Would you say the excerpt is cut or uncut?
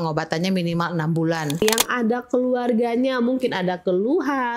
cut